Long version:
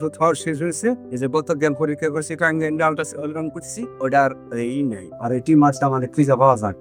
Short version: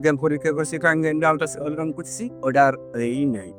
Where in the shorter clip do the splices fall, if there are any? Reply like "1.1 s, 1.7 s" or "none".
none